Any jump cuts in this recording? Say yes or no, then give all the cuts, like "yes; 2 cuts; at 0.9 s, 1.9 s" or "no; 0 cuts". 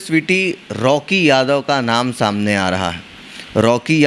no; 0 cuts